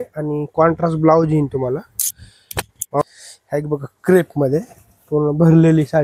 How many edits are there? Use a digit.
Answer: 1